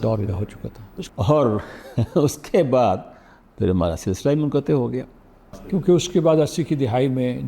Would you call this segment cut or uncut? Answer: uncut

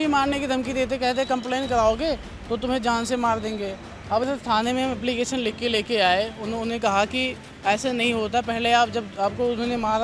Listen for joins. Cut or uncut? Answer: cut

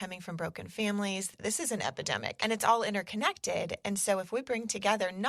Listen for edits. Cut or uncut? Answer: cut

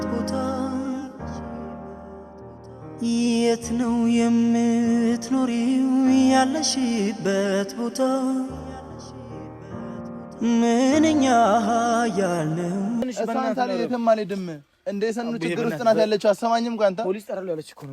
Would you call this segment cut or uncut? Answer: cut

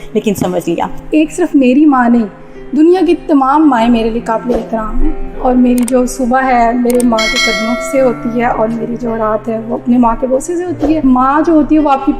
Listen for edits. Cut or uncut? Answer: cut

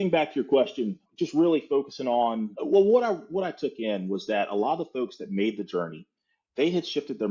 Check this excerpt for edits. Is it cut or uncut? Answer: cut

